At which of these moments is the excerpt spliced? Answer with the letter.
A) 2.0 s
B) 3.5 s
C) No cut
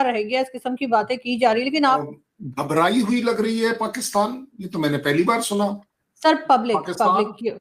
A